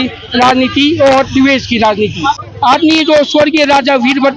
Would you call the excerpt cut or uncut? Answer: cut